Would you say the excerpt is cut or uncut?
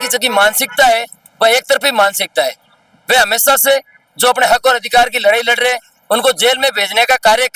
uncut